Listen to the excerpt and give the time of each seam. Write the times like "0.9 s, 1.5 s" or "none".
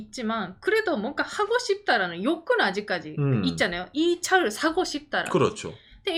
none